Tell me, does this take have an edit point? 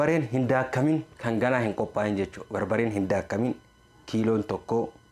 no; 0 cuts

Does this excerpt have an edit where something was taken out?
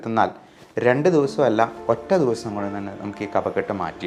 no; 0 cuts

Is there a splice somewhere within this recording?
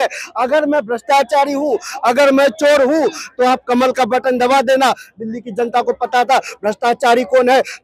no; 0 cuts

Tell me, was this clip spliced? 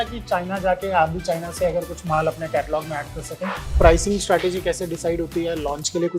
yes; 1 cut; at 3.7 s

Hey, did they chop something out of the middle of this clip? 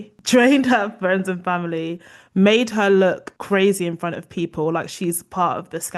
no; 0 cuts

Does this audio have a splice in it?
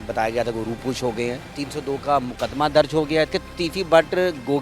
yes; 2 cuts; at 1.5 s, 3.3 s

